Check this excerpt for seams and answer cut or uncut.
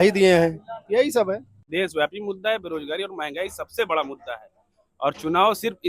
cut